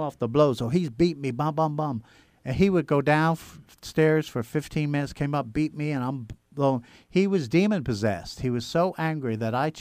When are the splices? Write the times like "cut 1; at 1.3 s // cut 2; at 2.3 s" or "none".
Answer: none